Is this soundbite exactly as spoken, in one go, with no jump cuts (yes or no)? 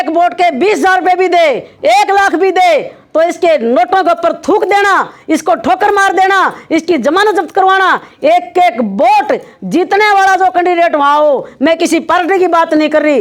yes